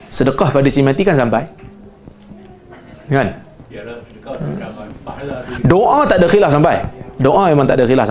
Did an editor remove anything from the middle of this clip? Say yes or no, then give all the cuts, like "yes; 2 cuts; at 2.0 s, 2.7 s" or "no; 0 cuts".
yes; 1 cut; at 4.9 s